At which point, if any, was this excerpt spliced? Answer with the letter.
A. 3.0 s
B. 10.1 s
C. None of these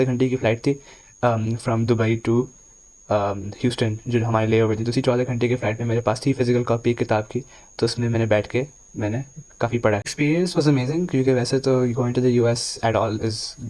B